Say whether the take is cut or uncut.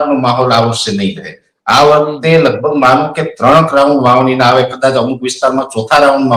uncut